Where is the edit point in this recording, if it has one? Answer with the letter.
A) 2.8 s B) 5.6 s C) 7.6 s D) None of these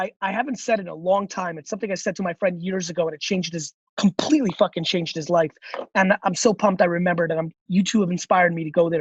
D